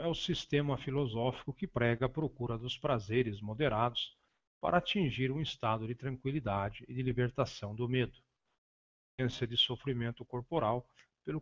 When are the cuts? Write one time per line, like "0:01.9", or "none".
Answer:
0:03.1